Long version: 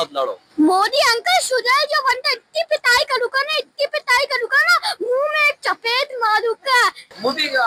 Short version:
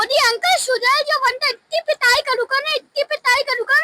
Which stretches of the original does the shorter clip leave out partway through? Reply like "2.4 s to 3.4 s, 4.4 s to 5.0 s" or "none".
none